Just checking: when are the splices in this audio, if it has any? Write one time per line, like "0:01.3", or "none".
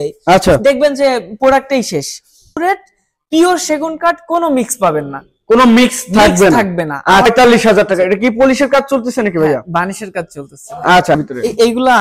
0:02.6
0:07.2
0:11.2